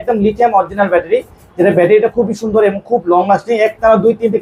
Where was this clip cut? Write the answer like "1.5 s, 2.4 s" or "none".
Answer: none

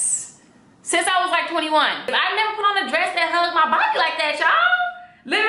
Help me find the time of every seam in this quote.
2.1 s

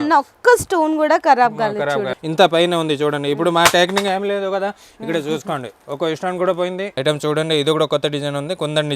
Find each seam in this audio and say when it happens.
2.1 s, 6.9 s

